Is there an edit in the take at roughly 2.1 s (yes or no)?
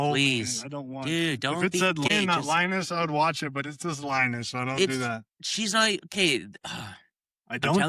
yes